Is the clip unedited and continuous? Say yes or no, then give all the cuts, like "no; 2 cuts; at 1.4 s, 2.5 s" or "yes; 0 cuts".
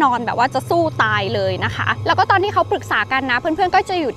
yes; 0 cuts